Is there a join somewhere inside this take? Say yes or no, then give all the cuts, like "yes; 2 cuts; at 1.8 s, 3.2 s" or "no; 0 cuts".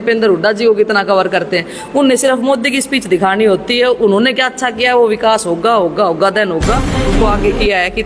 yes; 1 cut; at 7.2 s